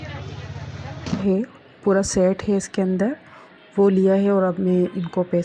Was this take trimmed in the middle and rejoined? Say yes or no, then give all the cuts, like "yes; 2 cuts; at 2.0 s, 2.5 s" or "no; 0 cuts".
yes; 1 cut; at 1.2 s